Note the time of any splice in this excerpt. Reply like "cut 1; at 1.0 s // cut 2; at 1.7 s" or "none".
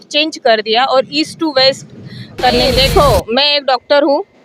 cut 1; at 2.5 s